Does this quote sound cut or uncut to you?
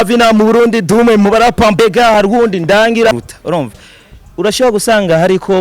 cut